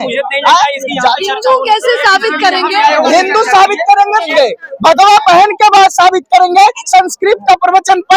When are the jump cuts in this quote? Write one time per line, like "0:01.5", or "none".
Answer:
0:04.3